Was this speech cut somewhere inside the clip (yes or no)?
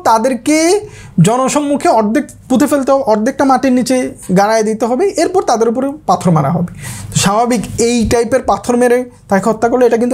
no